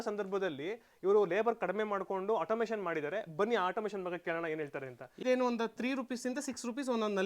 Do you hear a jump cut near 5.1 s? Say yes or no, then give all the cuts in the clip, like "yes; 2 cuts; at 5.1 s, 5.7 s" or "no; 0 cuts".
yes; 1 cut; at 5.1 s